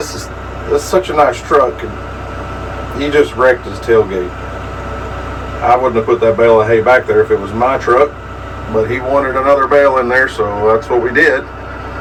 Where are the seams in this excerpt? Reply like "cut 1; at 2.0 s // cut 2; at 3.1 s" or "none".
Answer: none